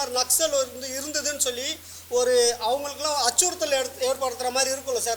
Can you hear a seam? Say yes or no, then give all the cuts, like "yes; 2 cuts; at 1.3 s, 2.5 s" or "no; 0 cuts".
no; 0 cuts